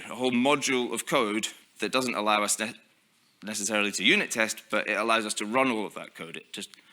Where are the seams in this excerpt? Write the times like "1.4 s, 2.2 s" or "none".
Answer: 1.6 s